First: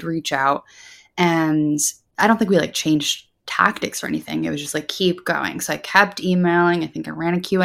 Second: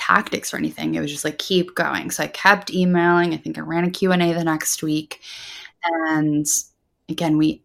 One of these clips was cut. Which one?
first; 1 cut; at 2.0 s

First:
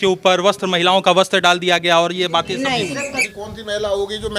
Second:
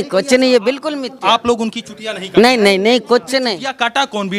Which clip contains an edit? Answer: first; 1 cut; at 3.1 s

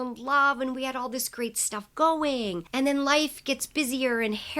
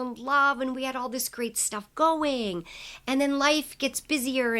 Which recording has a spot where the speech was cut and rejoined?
first; 1 cut; at 2.6 s

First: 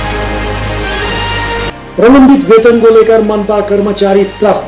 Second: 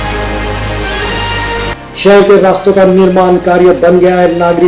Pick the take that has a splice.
first; 1 cut; at 1.5 s

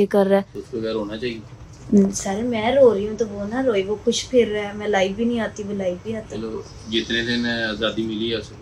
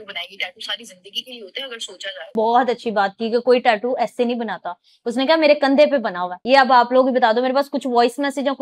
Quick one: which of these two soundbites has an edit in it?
second; 2 cuts; at 2.3 s, 6.3 s

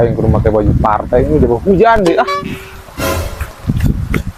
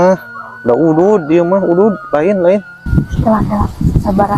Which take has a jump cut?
second; 1 cut; at 2.8 s

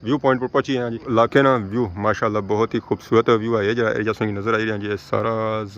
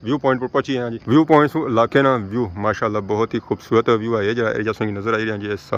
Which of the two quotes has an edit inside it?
first; 1 cut; at 1.0 s

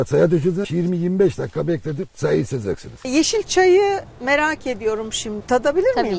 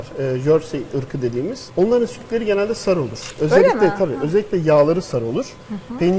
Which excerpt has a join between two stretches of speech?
first; 2 cuts; at 3.1 s, 5.4 s

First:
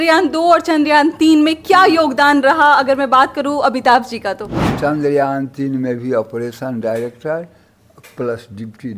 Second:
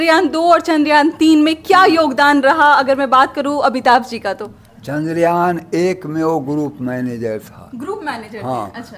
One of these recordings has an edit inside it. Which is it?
first; 1 cut; at 4.6 s

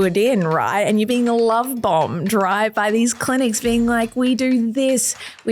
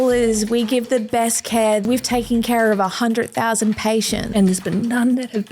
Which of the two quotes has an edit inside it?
second; 2 cuts; at 1.8 s, 4.3 s

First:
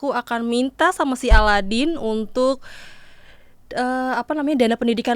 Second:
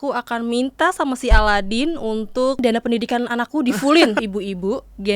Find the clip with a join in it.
second; 2 cuts; at 2.6 s, 4.2 s

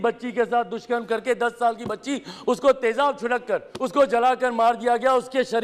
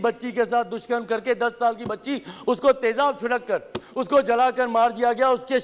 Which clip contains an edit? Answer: first; 1 cut; at 3.8 s

